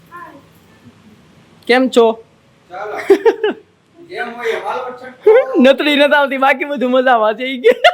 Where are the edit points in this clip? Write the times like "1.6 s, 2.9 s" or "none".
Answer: none